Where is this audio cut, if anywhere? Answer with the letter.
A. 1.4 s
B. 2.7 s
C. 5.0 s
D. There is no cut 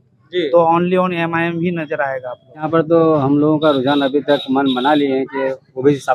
B